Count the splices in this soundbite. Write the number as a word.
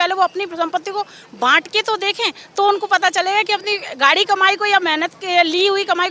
zero